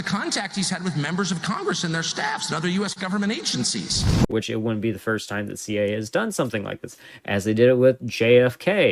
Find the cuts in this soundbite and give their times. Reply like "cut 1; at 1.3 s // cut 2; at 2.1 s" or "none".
cut 1; at 4.3 s